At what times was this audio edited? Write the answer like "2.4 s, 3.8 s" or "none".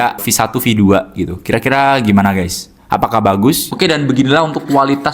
3.7 s